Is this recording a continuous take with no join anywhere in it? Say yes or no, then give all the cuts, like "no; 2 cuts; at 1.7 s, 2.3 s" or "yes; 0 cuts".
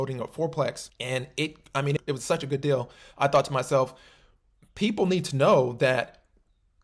no; 1 cut; at 0.9 s